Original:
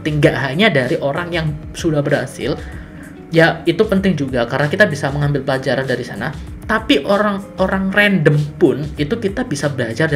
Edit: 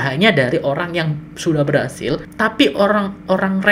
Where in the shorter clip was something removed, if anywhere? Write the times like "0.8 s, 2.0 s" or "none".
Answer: 2.3 s